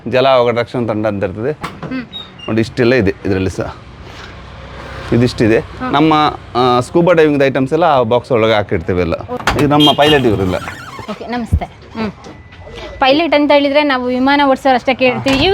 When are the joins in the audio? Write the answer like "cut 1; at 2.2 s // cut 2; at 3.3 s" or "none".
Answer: cut 1; at 1.6 s // cut 2; at 9.3 s